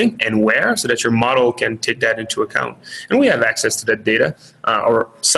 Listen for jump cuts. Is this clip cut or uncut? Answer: uncut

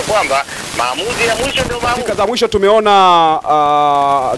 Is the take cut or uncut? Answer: cut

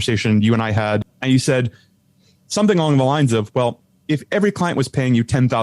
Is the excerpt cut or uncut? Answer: cut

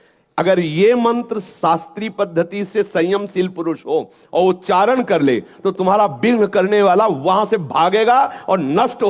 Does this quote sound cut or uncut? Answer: uncut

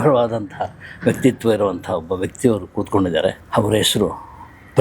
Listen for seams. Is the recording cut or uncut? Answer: cut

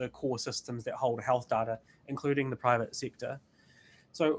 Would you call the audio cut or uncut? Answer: uncut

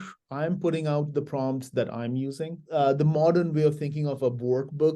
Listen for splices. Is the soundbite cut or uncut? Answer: cut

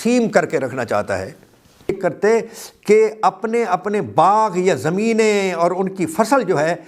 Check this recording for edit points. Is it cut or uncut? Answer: cut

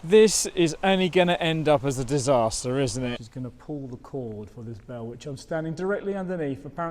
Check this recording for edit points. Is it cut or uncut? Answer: cut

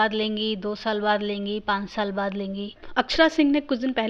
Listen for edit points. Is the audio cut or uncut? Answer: cut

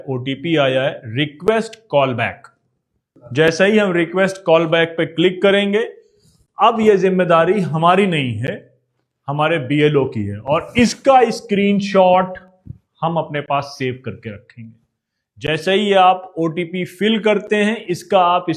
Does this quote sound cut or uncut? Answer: uncut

